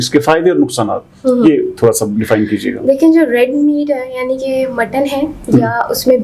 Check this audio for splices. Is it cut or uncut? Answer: uncut